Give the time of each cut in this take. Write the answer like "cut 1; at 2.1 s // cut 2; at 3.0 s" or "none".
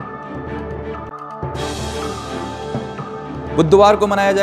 none